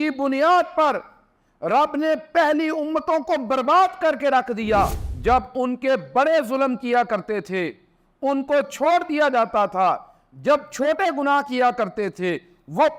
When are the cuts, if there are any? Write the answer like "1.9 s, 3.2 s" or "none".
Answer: 5.1 s